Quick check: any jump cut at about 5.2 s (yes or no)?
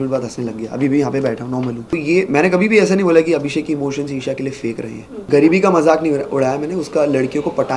yes